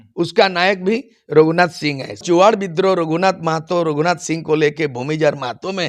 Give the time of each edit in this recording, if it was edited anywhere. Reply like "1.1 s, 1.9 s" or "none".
2.2 s